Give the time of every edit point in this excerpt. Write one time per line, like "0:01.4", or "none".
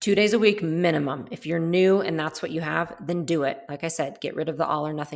none